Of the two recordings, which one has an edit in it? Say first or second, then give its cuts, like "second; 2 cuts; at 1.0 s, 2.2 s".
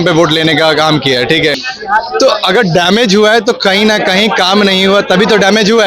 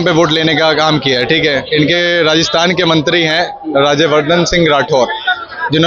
first; 1 cut; at 1.6 s